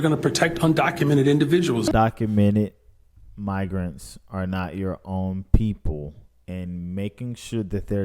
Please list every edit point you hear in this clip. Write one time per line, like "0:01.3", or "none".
0:01.9